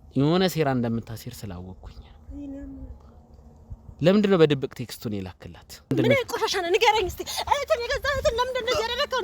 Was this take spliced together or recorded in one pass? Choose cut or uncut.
cut